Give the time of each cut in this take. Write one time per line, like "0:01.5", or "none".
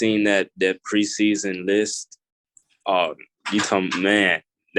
none